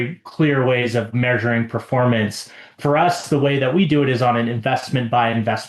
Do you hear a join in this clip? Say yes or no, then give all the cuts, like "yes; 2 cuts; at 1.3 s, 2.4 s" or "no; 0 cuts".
yes; 1 cut; at 1.1 s